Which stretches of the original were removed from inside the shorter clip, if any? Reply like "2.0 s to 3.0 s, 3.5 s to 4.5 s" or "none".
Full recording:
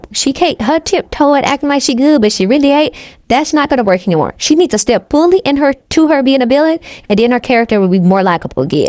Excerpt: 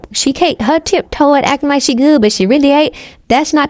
none